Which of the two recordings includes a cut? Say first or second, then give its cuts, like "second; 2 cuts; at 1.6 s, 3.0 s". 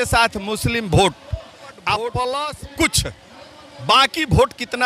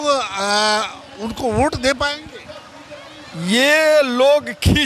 first; 1 cut; at 2.6 s